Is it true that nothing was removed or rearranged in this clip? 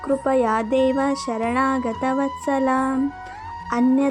yes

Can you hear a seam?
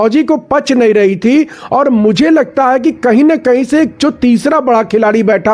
no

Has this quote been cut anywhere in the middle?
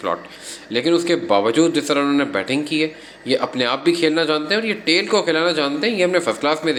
no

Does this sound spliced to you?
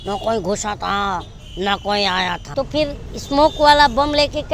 yes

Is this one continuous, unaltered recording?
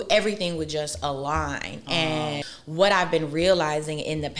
no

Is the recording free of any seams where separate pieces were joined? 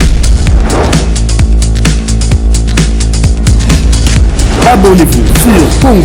yes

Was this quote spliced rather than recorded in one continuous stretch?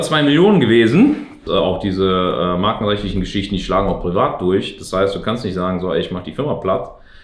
yes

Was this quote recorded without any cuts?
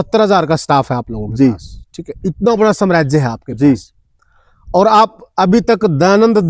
yes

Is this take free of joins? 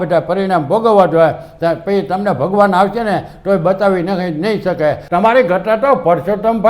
no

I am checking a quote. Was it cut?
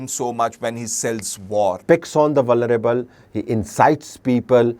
yes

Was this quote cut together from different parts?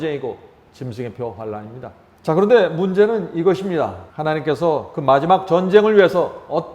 yes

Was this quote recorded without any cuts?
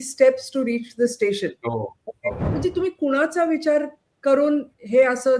no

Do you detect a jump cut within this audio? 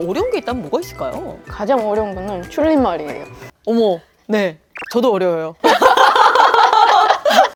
no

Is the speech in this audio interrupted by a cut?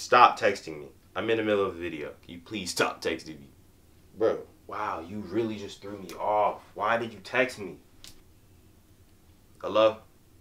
yes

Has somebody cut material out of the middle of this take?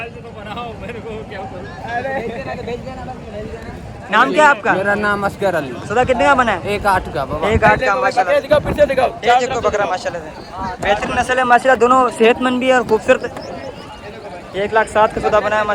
no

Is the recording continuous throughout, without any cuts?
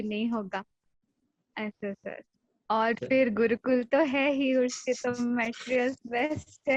yes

